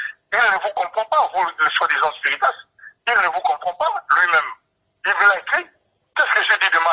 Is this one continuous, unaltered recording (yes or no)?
yes